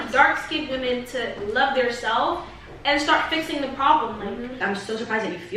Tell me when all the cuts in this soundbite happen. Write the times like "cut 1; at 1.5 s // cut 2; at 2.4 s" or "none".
cut 1; at 4.5 s